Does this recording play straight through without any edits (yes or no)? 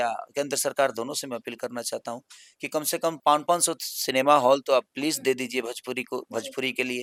yes